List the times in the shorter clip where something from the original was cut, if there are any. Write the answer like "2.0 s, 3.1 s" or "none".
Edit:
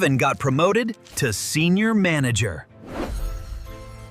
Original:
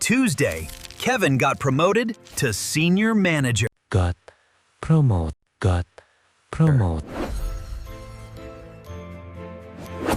2.7 s